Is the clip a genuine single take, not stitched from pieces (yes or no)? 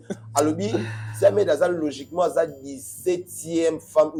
yes